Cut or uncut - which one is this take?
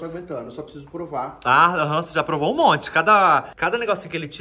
cut